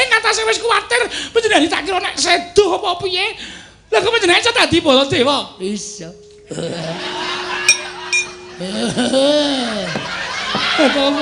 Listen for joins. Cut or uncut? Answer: uncut